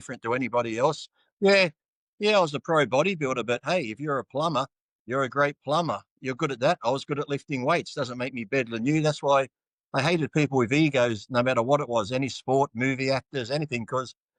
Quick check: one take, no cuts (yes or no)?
yes